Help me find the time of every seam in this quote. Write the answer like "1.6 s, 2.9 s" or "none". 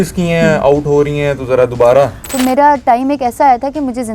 2.2 s